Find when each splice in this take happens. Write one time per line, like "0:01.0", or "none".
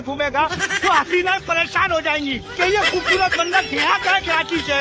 0:02.5